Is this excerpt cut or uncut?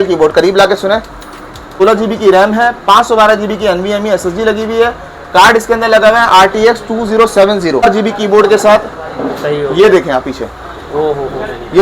cut